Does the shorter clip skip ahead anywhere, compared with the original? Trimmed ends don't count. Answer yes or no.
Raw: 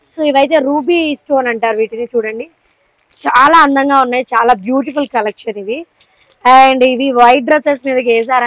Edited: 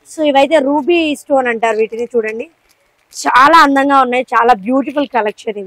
no